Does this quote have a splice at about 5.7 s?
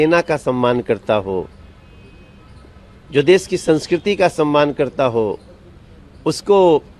no; 0 cuts

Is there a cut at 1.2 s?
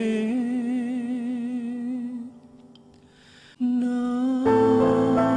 no; 1 cut; at 3.5 s

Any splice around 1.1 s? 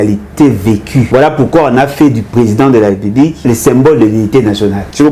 yes; 2 cuts; at 1.1 s, 3.4 s

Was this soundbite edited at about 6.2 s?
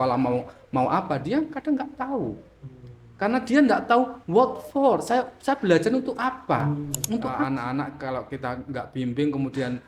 no; 1 cut; at 7.5 s

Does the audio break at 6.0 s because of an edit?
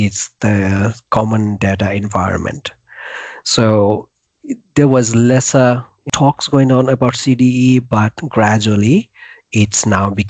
yes; 1 cut; at 6.0 s

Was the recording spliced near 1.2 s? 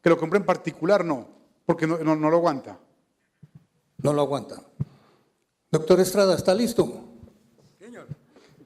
yes; 1 cut; at 1.2 s

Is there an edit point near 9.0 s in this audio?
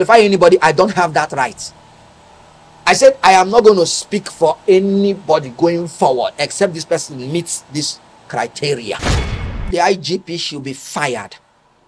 yes; 1 cut; at 9.0 s

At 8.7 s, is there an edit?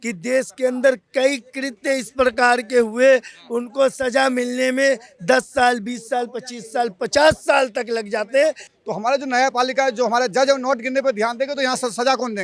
yes; 1 cut; at 8.7 s

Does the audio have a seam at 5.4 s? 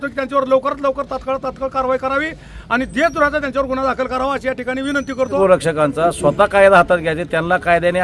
yes; 1 cut; at 5.4 s

